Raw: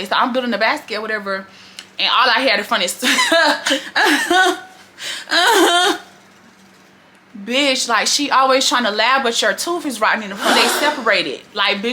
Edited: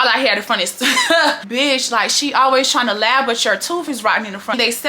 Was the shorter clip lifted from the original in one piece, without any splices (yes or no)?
no